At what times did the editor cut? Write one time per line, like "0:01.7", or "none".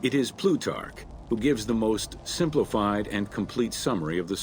none

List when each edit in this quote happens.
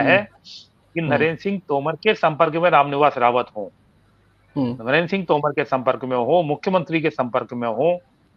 none

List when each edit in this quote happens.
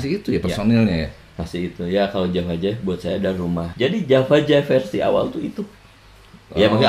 0:03.7

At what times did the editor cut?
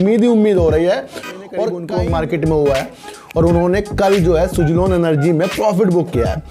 0:01.5

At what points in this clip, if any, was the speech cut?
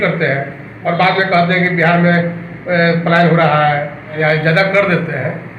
0:04.2

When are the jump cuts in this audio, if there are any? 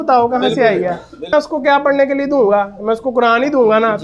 0:01.3

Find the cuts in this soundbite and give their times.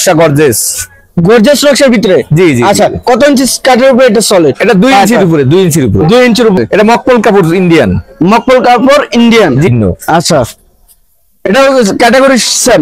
0:06.6
0:09.7

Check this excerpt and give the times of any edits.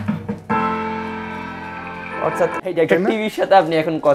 0:02.6

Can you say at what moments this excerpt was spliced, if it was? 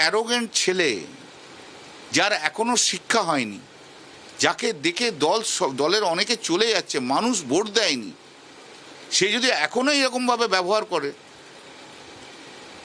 none

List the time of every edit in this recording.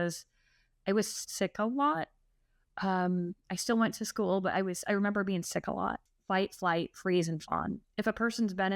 0:06.1
0:07.8

